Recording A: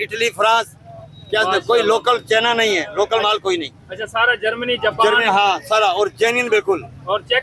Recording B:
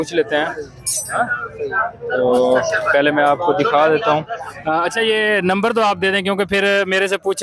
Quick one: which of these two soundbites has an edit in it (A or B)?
B